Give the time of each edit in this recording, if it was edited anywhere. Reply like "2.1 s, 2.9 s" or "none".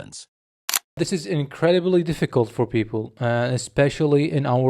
0.9 s